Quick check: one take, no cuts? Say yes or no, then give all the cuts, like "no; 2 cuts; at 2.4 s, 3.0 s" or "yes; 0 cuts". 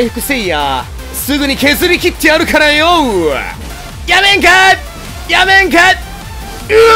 yes; 0 cuts